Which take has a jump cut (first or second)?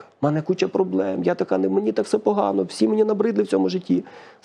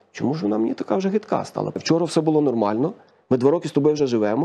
second